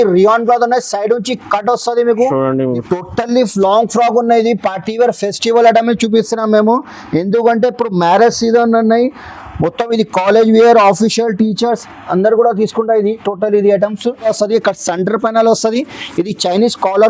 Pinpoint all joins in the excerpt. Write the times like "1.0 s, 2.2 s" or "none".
2.8 s, 14.3 s